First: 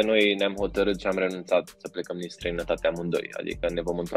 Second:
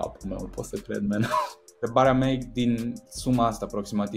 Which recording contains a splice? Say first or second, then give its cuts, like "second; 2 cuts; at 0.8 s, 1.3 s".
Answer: second; 1 cut; at 1.8 s